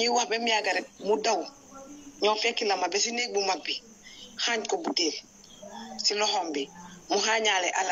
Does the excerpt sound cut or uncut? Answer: uncut